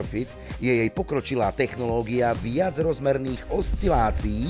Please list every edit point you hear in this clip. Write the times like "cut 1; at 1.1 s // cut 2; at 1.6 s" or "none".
none